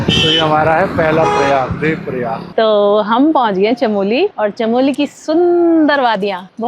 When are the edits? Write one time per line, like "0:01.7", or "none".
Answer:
0:02.5